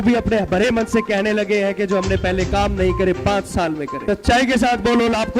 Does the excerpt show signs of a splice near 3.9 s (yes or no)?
yes